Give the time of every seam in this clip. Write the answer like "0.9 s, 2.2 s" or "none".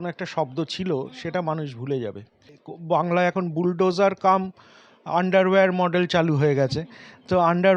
2.6 s